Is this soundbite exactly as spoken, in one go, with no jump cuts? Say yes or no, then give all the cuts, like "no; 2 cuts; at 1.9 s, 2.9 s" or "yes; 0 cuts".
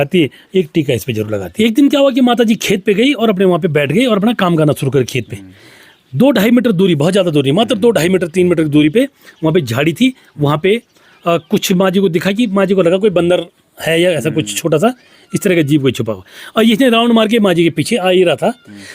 no; 1 cut; at 1.4 s